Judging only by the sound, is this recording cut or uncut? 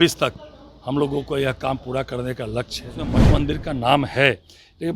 cut